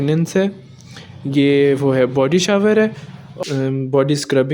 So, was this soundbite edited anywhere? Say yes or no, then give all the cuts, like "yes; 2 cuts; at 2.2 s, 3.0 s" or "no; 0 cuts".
yes; 1 cut; at 3.2 s